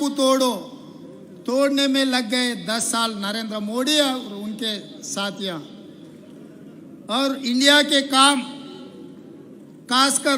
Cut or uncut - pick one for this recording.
cut